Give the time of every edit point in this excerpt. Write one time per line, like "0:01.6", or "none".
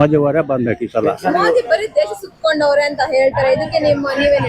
none